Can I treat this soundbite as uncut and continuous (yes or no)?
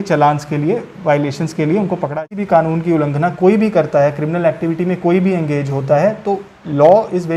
no